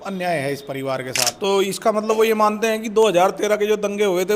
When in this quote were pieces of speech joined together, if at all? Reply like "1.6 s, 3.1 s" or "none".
1.3 s